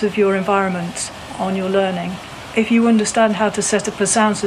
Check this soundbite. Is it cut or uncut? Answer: cut